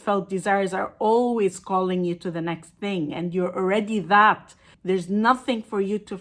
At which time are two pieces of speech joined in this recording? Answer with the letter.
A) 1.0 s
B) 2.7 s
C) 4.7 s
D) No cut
C